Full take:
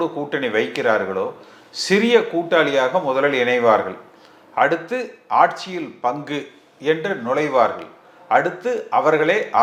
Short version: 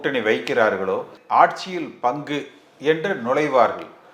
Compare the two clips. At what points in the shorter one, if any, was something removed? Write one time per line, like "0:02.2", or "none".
0:01.2